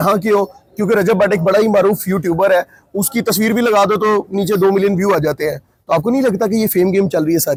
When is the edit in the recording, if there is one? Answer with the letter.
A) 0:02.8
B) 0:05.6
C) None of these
C